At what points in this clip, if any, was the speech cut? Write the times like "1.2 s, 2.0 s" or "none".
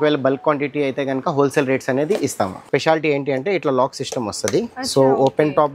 2.6 s